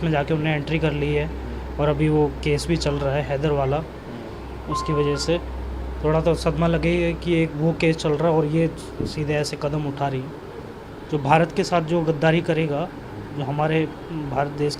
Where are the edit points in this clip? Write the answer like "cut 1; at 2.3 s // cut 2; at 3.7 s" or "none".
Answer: cut 1; at 10.8 s